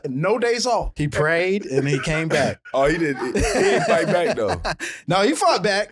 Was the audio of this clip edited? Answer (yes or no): yes